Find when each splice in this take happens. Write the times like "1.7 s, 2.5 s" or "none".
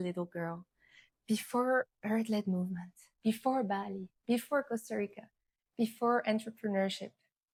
none

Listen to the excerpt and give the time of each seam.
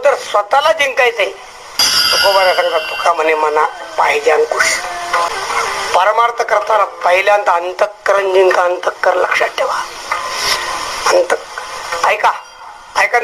1.8 s, 5.3 s

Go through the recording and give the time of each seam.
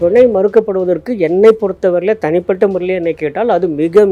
none

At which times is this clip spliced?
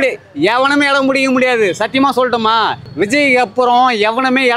2.8 s

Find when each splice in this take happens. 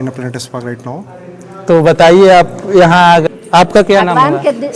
3.2 s

